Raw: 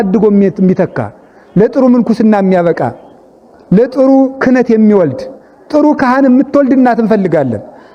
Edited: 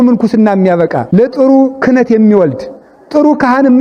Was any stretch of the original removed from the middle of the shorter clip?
yes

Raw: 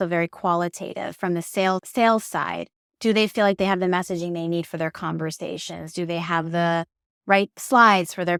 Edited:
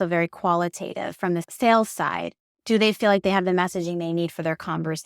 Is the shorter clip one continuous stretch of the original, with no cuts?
no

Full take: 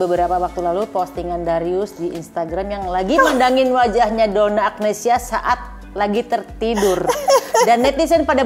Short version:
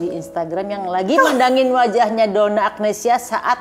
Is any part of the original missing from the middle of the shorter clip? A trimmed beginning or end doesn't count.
no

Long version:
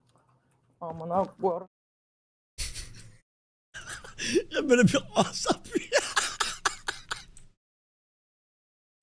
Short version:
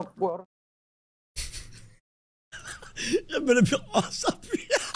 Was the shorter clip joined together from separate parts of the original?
no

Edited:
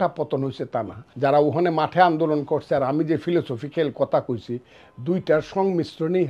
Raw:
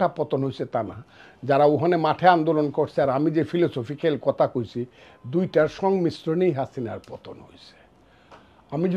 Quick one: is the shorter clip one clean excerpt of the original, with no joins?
no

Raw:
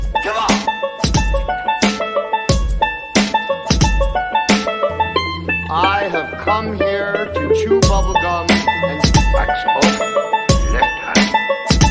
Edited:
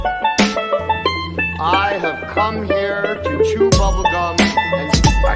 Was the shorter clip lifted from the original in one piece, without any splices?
no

